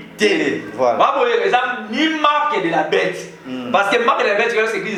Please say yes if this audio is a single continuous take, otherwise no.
yes